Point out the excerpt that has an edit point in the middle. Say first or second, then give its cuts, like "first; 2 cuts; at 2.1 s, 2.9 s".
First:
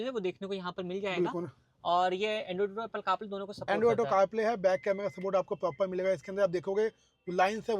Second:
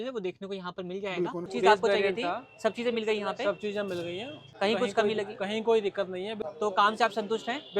second; 3 cuts; at 1.5 s, 4.4 s, 6.4 s